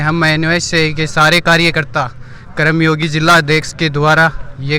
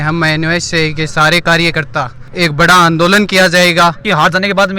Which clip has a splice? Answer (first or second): second